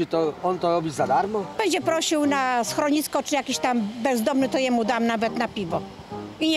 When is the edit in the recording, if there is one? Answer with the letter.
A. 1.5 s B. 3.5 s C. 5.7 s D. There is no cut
A